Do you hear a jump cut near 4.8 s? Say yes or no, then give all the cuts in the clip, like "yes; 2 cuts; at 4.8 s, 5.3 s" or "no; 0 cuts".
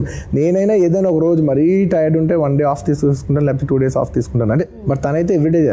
yes; 1 cut; at 4.8 s